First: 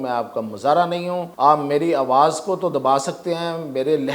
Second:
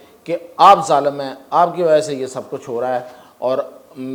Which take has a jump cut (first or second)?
first